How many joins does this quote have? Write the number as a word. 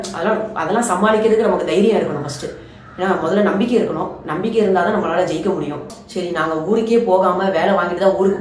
one